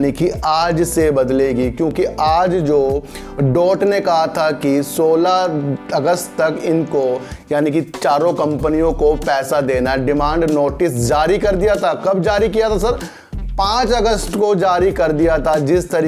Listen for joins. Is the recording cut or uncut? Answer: uncut